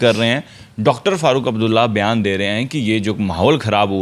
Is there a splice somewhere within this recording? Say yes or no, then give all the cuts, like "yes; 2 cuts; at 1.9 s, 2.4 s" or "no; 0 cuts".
no; 0 cuts